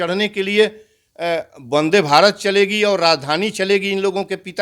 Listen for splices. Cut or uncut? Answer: uncut